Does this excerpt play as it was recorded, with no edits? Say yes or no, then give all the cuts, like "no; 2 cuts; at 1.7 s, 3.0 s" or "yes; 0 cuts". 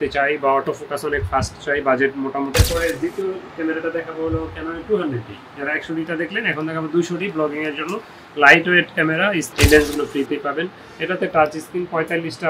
no; 2 cuts; at 2.5 s, 9.5 s